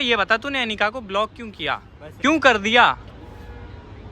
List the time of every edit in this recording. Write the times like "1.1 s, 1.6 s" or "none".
2.0 s